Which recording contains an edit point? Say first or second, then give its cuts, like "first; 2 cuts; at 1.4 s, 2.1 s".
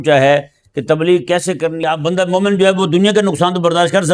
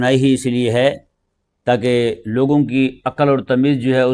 first; 1 cut; at 1.8 s